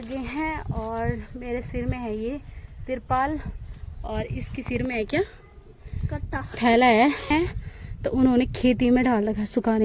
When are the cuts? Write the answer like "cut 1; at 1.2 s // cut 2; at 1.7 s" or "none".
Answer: cut 1; at 7.3 s